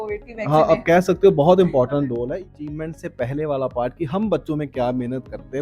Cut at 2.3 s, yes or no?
yes